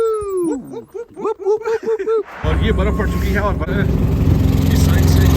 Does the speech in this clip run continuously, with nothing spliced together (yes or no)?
no